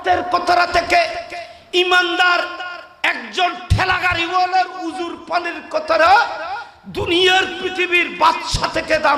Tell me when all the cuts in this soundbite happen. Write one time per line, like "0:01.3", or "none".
none